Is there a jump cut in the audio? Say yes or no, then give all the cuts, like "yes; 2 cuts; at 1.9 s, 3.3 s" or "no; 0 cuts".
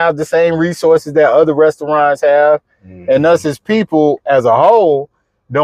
no; 0 cuts